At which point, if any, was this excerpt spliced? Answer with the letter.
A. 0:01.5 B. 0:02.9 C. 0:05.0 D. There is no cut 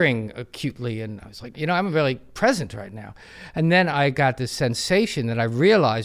A